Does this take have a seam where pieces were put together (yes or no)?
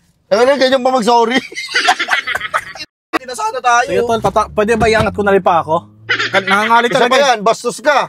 yes